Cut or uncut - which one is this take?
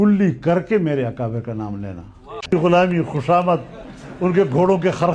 cut